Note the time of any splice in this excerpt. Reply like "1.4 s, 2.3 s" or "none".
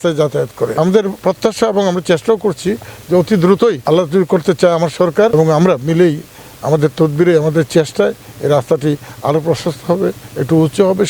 1.0 s, 3.8 s, 5.3 s